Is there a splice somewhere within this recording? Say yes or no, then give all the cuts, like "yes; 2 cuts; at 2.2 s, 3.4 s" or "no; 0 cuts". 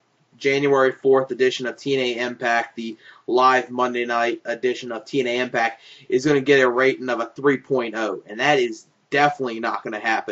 no; 0 cuts